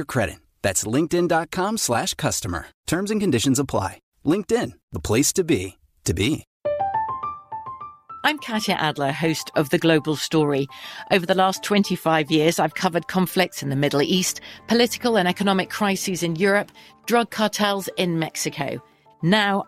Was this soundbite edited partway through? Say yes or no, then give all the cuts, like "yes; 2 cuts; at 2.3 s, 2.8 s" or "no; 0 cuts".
yes; 1 cut; at 6.5 s